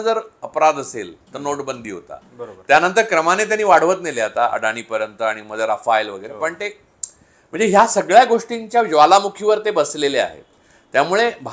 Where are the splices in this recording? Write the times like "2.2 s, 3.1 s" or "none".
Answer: none